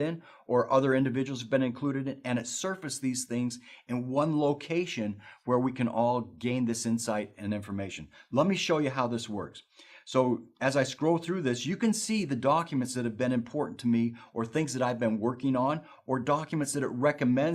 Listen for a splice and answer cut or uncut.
uncut